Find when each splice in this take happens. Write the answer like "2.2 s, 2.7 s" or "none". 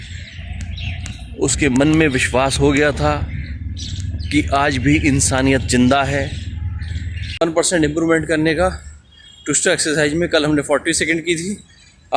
7.4 s